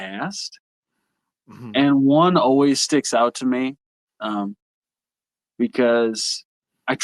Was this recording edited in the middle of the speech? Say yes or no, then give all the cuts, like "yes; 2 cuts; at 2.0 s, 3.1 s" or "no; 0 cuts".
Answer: no; 0 cuts